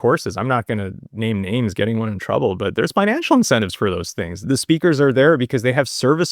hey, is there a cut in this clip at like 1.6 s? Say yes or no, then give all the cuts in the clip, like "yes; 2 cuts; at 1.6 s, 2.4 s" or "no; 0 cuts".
no; 1 cut; at 4.4 s